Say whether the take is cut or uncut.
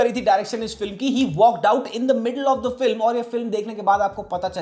uncut